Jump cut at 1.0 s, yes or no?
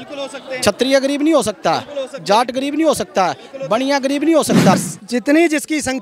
no